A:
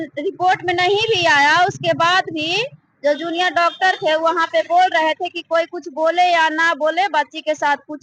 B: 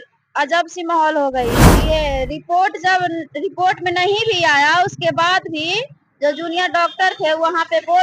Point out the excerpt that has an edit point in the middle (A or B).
B